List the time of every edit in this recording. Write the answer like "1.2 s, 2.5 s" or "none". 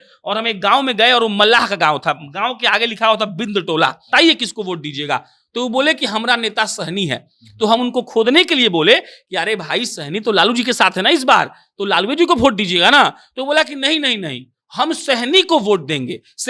4.1 s